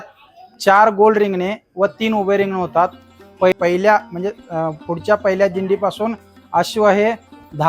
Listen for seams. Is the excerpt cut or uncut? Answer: cut